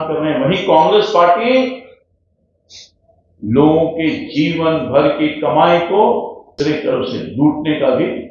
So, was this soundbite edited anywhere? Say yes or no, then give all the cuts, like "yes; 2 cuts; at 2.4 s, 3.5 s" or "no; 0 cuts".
yes; 1 cut; at 6.5 s